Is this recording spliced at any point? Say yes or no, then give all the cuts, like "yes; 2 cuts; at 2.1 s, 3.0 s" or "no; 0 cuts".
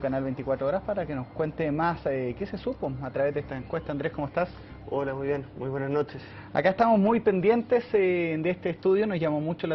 yes; 1 cut; at 8.7 s